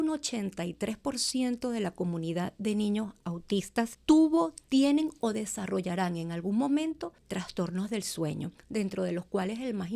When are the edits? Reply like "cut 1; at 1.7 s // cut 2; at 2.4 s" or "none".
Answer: cut 1; at 4.0 s // cut 2; at 7.2 s // cut 3; at 8.5 s